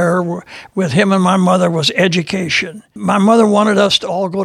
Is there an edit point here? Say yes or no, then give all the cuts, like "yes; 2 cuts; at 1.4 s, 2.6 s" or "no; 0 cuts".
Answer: yes; 1 cut; at 2.9 s